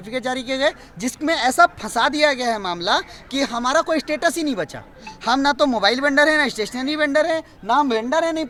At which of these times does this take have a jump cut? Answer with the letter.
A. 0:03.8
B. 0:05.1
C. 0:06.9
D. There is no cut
D